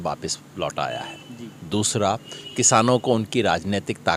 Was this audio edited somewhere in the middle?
no; 0 cuts

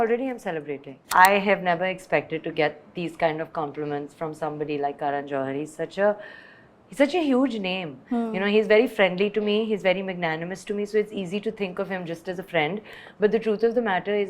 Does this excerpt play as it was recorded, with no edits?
no; 1 cut; at 0.9 s

